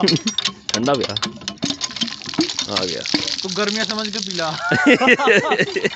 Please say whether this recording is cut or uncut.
uncut